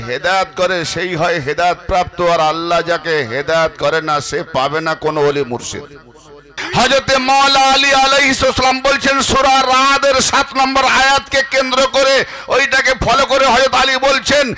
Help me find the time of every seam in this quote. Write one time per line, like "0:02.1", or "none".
0:06.6